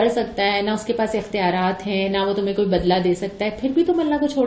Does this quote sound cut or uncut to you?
uncut